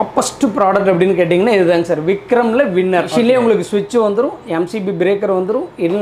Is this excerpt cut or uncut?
cut